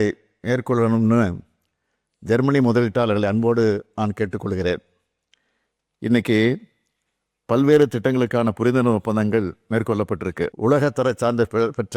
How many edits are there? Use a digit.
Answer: 1